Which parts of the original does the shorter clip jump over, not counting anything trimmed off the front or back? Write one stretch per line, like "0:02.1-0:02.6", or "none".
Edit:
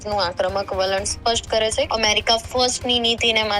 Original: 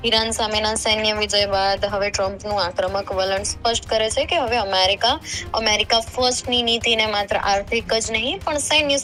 0:04.3-0:05.5